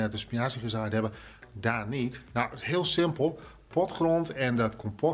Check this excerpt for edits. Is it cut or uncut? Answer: uncut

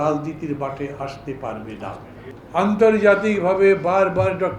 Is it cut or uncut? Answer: cut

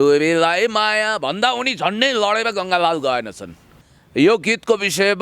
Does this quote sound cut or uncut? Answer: cut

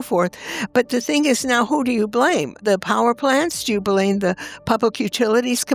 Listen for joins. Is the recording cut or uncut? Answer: cut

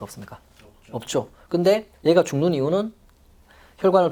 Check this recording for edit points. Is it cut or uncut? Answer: uncut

